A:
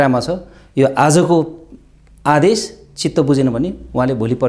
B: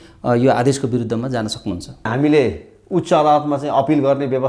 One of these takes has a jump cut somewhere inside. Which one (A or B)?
B